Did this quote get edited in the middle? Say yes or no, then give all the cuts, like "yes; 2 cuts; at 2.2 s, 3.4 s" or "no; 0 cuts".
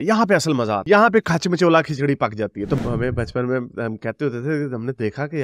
yes; 1 cut; at 2.7 s